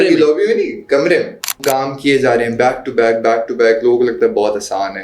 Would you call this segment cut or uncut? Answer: cut